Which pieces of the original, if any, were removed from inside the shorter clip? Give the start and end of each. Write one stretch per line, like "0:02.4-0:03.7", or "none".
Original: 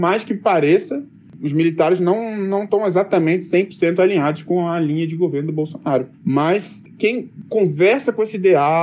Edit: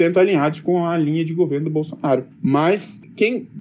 none